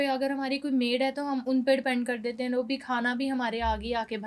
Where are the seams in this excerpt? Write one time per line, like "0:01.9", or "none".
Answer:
none